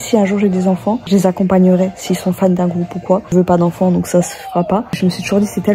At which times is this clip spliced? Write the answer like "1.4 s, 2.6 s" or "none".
1.0 s, 3.3 s, 5.0 s